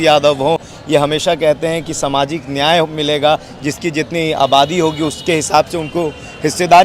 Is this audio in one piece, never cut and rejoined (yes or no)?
yes